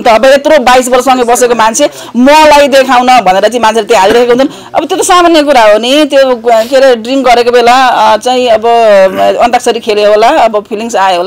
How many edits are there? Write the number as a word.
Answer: zero